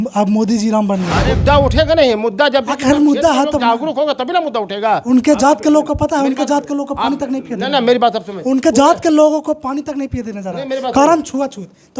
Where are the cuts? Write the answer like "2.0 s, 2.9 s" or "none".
1.3 s